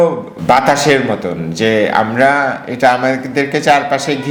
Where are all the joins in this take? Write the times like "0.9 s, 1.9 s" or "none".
none